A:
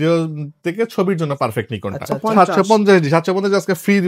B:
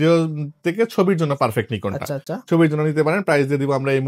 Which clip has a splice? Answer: A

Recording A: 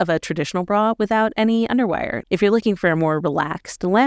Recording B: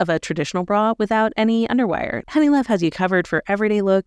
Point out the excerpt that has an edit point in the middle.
B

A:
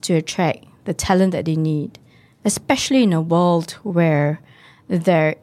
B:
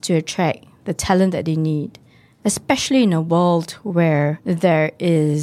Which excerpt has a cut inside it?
B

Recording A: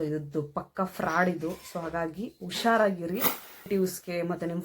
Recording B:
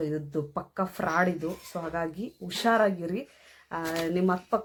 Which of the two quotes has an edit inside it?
A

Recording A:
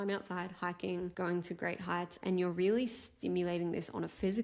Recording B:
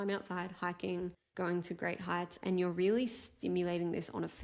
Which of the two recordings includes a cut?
A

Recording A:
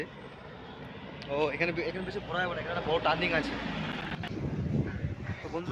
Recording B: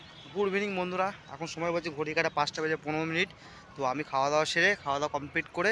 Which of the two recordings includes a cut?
A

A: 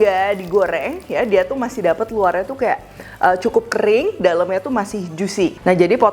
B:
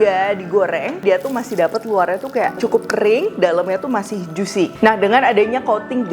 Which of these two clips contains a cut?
B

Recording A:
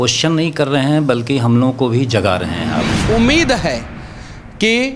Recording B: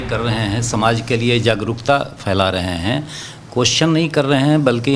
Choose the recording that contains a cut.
A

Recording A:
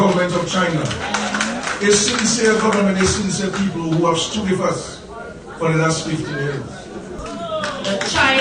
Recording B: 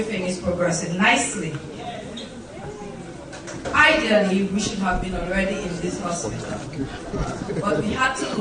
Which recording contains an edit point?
A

